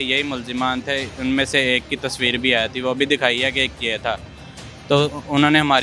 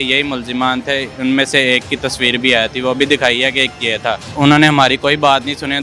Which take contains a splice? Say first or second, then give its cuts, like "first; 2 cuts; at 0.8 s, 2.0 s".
second; 1 cut; at 4.3 s